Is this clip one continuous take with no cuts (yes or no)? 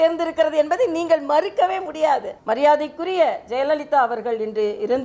no